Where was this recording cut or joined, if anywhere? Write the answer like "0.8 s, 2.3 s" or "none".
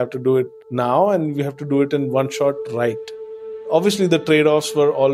3.6 s